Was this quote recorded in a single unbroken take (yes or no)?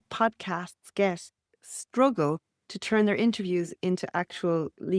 yes